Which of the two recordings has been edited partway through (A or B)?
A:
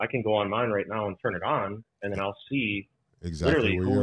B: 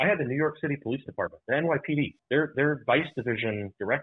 B